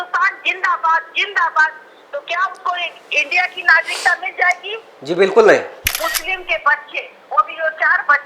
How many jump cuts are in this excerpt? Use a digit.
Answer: 1